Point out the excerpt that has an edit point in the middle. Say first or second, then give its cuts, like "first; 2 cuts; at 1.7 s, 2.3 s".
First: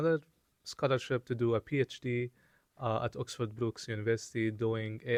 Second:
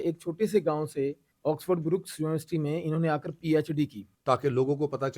second; 2 cuts; at 1.3 s, 4.1 s